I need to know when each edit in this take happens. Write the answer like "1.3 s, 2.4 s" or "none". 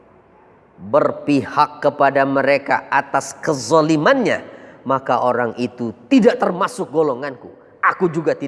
none